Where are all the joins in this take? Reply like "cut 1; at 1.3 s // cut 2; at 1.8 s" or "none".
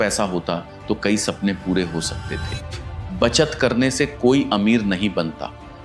cut 1; at 2.7 s